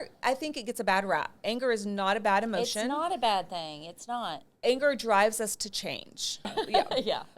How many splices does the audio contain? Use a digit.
1